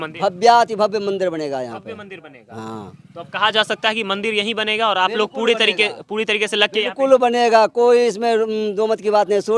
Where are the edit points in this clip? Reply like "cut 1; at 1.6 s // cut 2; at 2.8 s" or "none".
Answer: none